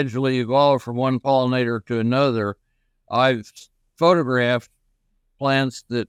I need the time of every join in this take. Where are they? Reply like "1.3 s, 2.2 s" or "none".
none

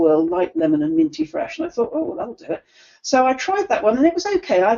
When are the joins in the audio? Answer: none

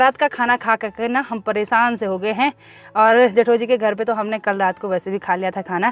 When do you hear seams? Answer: none

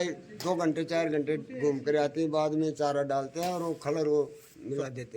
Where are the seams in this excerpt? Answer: none

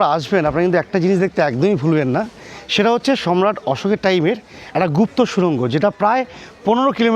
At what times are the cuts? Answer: none

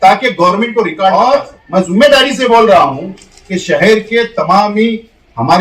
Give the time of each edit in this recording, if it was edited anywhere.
1.1 s

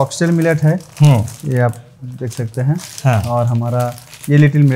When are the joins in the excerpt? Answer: none

